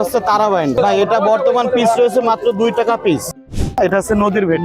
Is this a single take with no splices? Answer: no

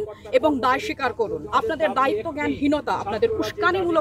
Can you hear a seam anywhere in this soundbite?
yes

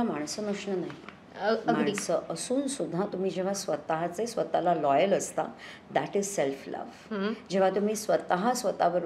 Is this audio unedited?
yes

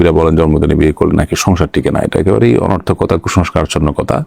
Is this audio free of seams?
yes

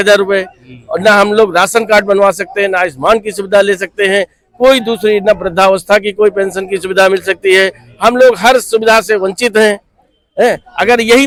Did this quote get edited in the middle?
no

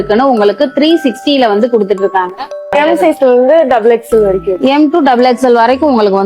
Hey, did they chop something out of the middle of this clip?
yes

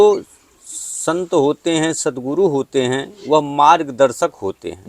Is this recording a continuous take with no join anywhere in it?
yes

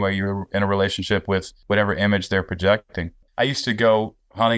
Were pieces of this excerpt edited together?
yes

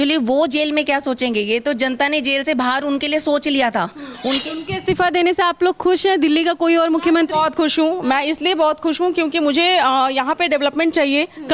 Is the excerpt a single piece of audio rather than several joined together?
no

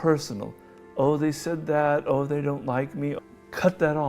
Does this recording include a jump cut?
yes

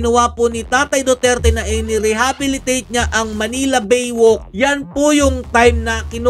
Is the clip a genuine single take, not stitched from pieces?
yes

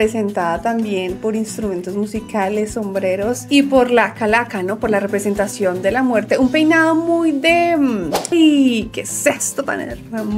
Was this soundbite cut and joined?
yes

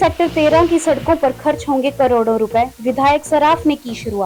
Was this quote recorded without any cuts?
yes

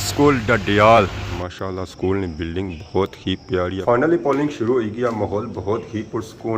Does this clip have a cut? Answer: yes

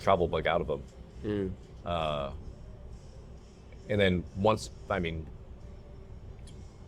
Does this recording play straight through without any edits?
yes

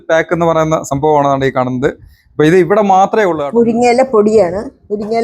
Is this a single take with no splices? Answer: no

